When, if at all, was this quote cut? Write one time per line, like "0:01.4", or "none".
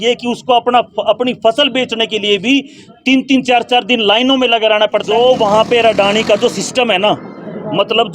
0:05.1